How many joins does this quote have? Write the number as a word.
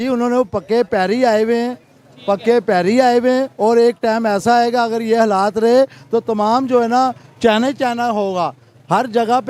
zero